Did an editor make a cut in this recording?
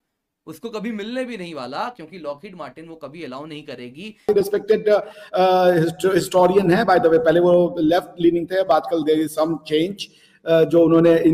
yes; 1 cut; at 4.3 s

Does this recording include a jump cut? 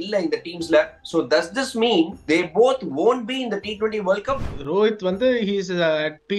yes; 2 cuts; at 1.0 s, 4.5 s

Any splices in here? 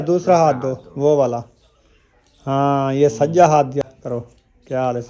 no; 0 cuts

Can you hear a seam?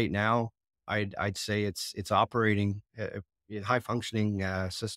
no; 0 cuts

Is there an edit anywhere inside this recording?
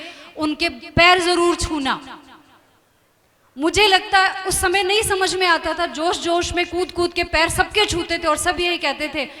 no; 0 cuts

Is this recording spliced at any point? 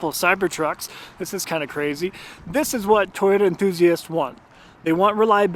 no; 0 cuts

